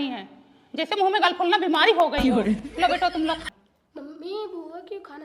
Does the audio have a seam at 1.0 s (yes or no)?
no